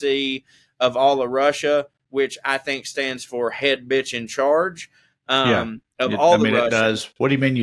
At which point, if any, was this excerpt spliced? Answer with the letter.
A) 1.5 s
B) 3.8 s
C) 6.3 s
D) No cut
D